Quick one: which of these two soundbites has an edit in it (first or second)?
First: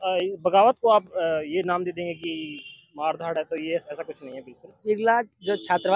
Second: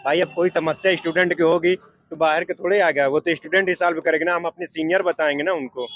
first